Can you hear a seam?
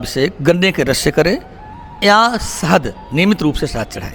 no; 0 cuts

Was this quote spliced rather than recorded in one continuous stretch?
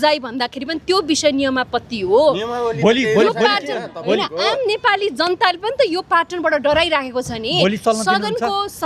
no; 0 cuts

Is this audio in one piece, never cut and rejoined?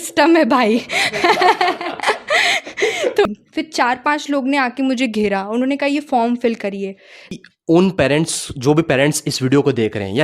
no; 2 cuts; at 3.2 s, 7.3 s

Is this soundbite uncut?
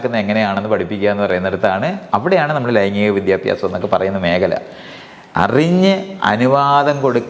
yes; 0 cuts

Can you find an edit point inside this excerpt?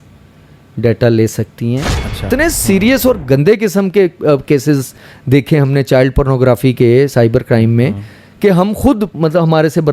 yes; 1 cut; at 2.3 s

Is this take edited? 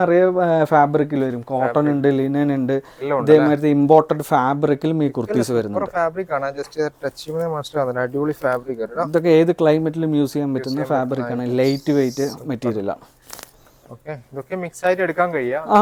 no; 0 cuts

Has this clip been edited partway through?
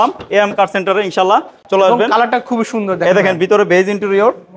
no; 0 cuts

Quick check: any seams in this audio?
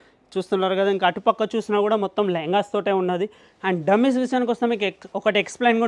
no; 0 cuts

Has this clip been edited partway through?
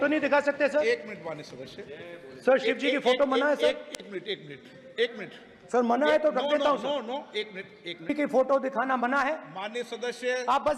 yes; 1 cut; at 8.1 s

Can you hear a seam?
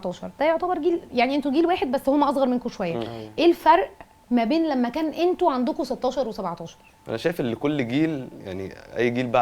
yes; 1 cut; at 6.9 s

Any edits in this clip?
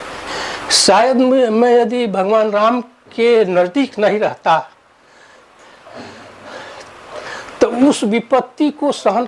no; 0 cuts

